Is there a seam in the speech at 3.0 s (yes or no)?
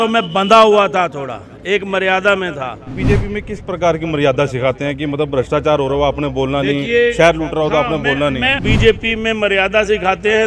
yes